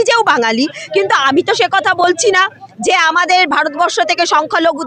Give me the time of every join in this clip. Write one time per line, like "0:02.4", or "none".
none